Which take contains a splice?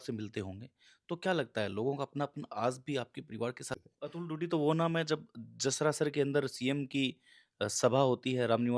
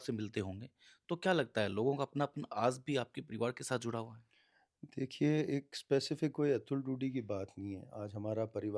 first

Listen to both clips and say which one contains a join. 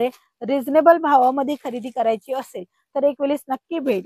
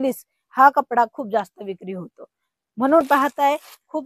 second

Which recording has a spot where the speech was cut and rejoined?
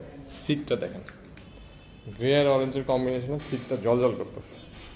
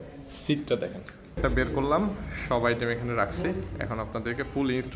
second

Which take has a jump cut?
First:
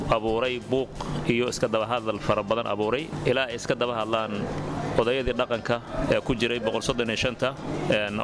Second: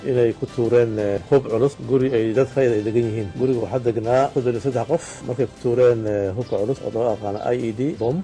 second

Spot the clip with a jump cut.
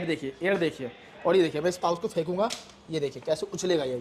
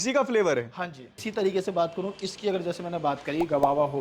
second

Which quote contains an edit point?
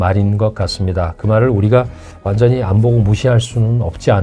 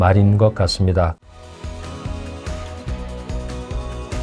second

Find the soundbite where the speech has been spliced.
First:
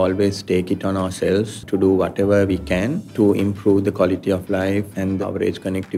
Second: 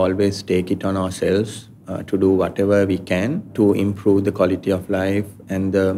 first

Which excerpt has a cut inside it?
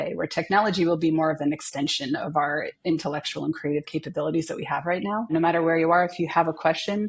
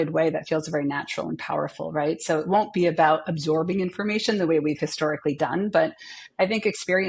first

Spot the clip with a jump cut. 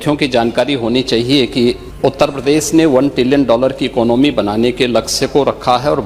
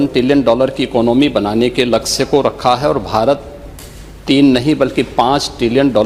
first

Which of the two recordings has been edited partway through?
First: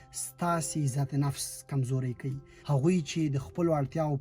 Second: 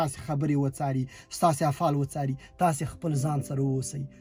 first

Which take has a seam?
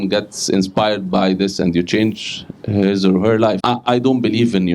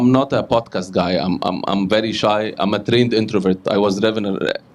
first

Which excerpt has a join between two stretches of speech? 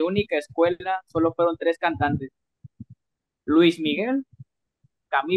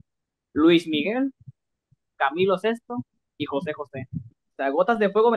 second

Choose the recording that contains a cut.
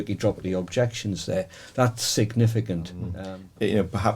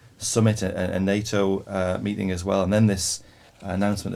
first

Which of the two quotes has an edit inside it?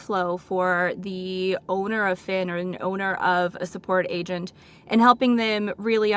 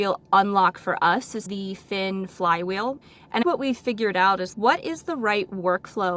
second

